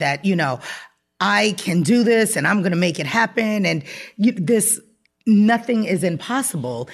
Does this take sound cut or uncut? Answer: uncut